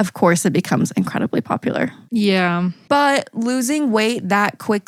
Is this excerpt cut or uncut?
uncut